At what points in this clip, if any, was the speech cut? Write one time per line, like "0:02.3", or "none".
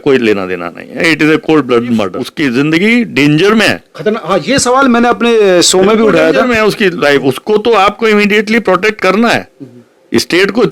0:02.2